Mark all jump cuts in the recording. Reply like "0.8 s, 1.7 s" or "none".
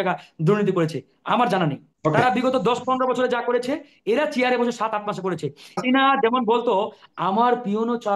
1.9 s, 5.8 s